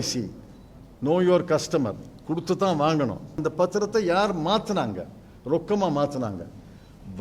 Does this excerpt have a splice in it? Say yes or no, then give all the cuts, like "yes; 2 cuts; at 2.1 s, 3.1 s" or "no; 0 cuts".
yes; 1 cut; at 3.3 s